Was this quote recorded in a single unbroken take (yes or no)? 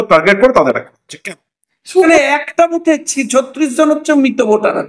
no